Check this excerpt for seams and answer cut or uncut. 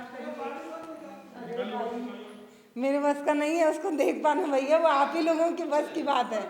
uncut